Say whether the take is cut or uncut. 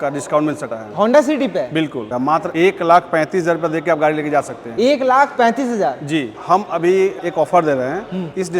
cut